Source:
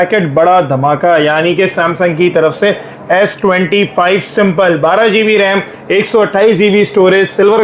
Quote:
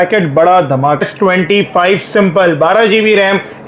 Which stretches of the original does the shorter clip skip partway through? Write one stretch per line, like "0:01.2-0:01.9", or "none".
0:01.0-0:03.2